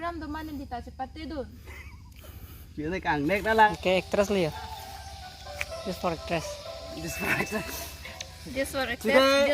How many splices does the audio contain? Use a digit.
1